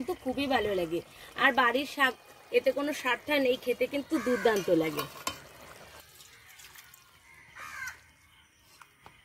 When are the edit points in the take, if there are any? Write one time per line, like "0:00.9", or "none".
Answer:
0:06.0